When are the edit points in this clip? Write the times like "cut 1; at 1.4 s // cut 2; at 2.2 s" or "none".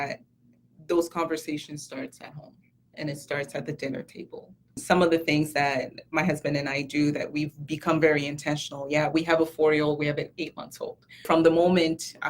cut 1; at 4.8 s // cut 2; at 11.2 s